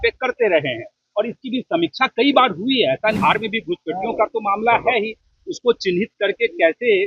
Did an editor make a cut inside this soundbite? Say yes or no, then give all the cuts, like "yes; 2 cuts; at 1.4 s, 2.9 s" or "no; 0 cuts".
yes; 1 cut; at 3.2 s